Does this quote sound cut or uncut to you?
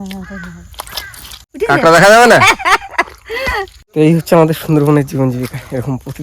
cut